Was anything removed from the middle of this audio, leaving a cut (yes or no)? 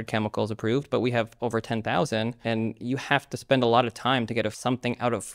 yes